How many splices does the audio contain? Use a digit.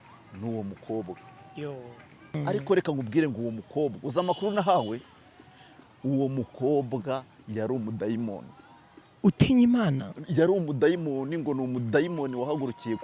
1